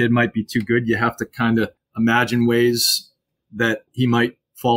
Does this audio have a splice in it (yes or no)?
yes